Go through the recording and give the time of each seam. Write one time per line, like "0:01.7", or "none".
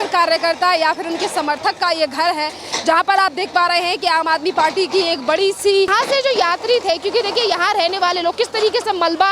0:05.9